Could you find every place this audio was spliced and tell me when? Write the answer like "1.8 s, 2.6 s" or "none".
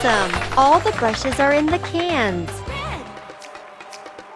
none